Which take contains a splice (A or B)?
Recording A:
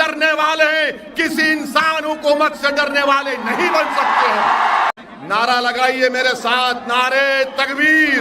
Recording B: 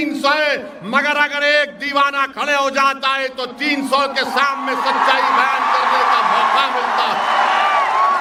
A